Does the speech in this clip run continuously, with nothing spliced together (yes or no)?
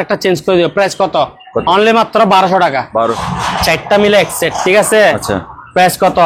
no